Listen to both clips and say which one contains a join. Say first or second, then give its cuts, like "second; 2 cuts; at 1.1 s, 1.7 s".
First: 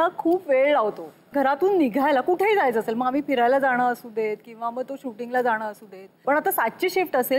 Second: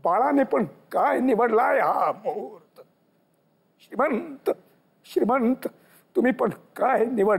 first; 2 cuts; at 1.2 s, 6.2 s